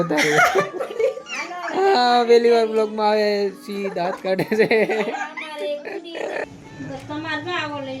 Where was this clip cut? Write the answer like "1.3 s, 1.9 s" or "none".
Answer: 6.5 s